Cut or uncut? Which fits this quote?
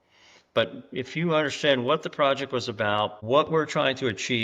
cut